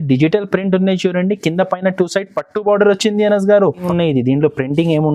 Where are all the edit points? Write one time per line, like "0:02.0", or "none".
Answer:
0:03.8

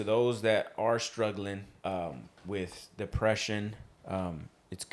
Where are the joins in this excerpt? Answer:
0:01.7
0:03.9

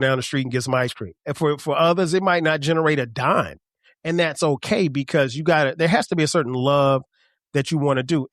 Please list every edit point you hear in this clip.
0:01.3

